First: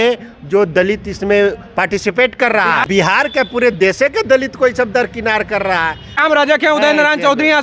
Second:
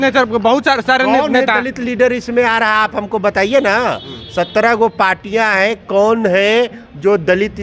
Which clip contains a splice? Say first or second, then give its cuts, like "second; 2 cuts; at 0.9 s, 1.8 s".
first; 2 cuts; at 2.9 s, 6.2 s